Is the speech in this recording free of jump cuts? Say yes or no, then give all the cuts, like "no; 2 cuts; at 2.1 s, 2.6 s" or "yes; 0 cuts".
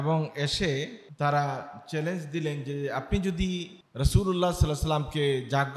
no; 2 cuts; at 1.0 s, 3.8 s